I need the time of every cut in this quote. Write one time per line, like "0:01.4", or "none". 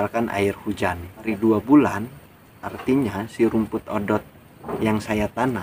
0:01.3